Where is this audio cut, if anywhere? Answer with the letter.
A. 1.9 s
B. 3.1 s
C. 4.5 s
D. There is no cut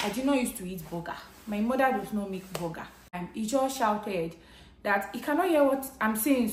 B